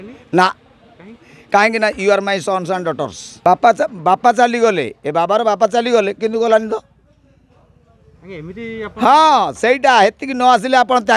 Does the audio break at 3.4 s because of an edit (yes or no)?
yes